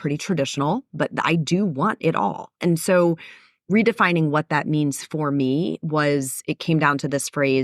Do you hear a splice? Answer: no; 0 cuts

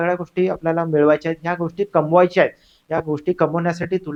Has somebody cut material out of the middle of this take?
no; 0 cuts

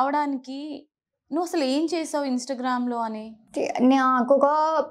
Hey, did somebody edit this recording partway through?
yes; 1 cut; at 3.4 s

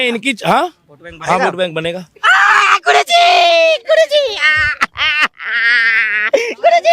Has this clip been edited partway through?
no; 0 cuts

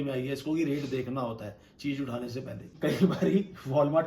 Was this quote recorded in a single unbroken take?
no; 1 cut; at 2.7 s

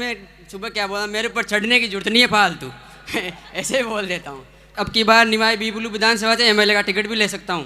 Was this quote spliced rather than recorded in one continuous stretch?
yes; 1 cut; at 4.7 s

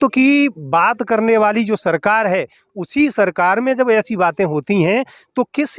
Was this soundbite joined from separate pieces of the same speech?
no; 0 cuts

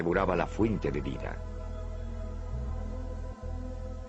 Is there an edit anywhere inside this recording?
yes; 1 cut; at 2.3 s

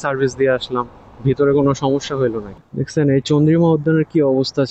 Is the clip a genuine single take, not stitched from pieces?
no; 1 cut; at 2.6 s

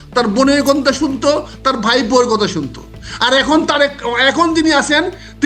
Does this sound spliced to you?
no; 0 cuts

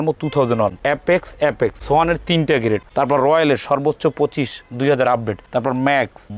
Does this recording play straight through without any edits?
no; 3 cuts; at 0.8 s, 1.8 s, 2.9 s

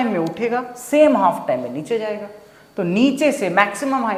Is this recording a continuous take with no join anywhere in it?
yes; 0 cuts

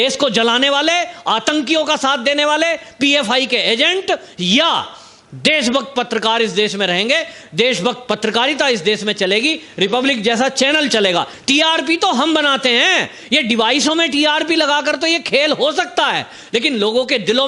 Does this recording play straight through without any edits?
no; 1 cut; at 11.3 s

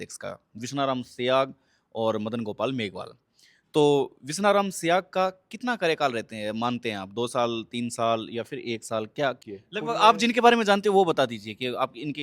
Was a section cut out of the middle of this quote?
yes; 1 cut; at 9.4 s

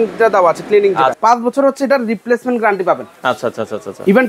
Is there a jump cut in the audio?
yes; 1 cut; at 1.2 s

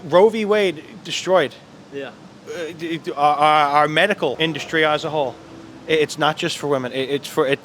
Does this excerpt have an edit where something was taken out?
yes; 1 cut; at 4.4 s

